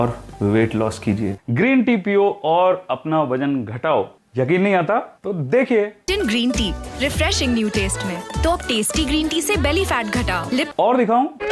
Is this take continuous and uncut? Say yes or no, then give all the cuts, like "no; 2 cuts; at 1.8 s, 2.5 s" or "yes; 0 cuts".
yes; 0 cuts